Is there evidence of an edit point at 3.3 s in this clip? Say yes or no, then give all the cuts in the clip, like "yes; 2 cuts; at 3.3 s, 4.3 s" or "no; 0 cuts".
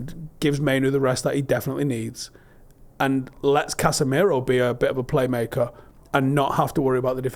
no; 0 cuts